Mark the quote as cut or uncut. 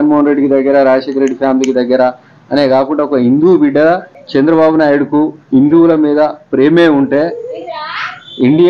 cut